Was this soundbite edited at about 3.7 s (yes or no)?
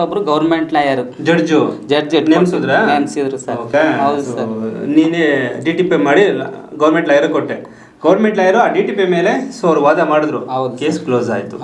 yes